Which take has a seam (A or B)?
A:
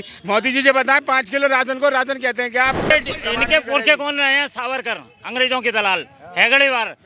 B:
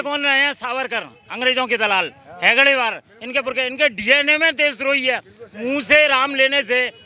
A